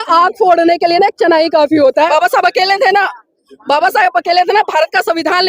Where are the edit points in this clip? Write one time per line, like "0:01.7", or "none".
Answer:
0:02.1